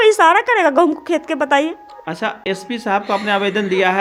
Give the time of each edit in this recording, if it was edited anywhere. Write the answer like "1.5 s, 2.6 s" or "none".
none